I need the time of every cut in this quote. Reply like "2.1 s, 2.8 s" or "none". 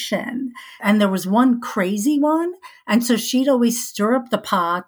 none